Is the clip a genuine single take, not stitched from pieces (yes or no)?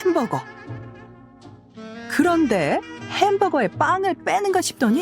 no